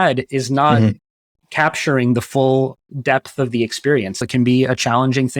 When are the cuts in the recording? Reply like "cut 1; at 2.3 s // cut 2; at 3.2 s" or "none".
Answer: cut 1; at 4.3 s